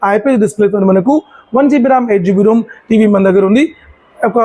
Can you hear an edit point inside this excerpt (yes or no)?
no